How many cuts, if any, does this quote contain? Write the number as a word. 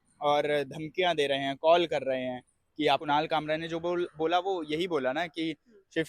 one